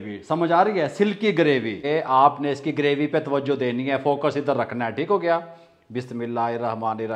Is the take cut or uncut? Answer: cut